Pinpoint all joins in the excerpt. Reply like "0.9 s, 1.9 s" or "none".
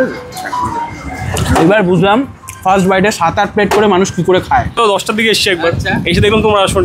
4.8 s

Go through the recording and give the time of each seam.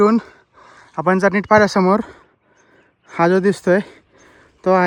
none

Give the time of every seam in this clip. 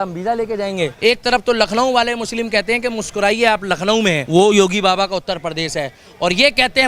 0.9 s, 4.2 s

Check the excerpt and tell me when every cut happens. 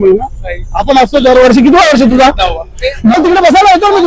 3.1 s

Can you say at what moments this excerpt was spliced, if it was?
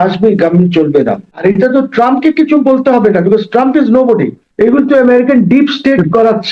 1.4 s, 4.4 s

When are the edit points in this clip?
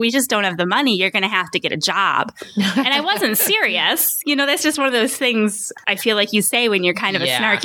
5.7 s

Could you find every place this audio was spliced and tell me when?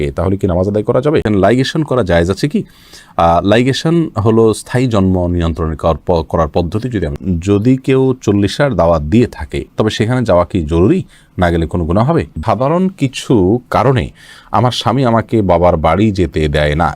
1.2 s, 7.1 s, 12.3 s

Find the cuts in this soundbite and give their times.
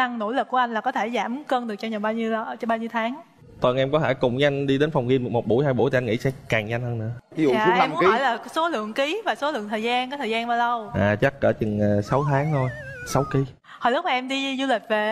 none

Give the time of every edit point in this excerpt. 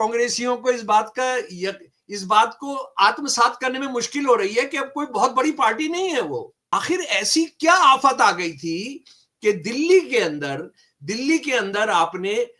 6.7 s

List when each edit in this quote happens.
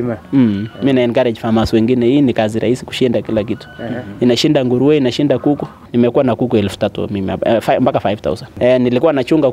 5.8 s, 8.5 s

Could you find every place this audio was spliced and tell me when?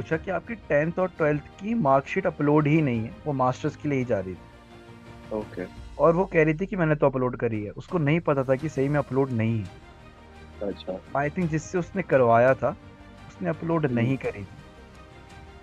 none

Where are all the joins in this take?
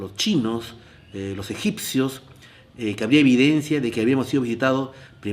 2.2 s

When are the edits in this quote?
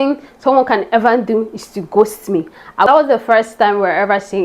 2.9 s

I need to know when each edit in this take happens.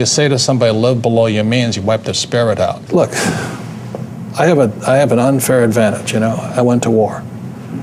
2.8 s

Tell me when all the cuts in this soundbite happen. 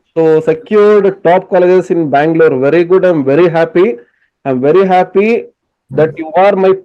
none

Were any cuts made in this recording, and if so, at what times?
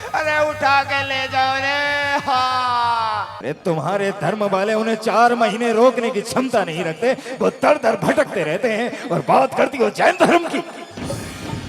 3.3 s

